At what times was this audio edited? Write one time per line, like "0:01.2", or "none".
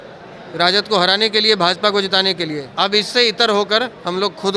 0:02.6